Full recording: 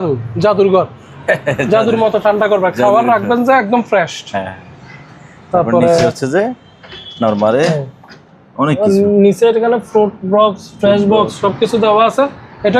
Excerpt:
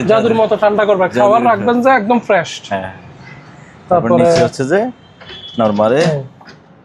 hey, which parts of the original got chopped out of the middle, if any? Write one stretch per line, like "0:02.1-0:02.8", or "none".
none